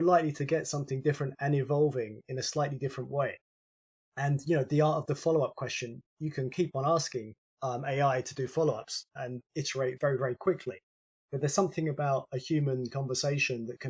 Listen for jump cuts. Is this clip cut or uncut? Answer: uncut